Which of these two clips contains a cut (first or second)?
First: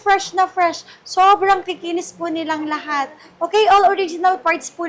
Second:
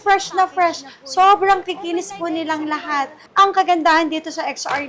second